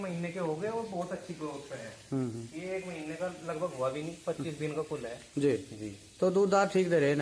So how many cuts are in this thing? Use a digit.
0